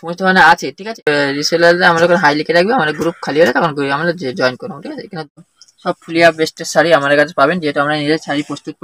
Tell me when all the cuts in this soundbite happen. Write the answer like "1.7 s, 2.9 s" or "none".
1.1 s, 5.3 s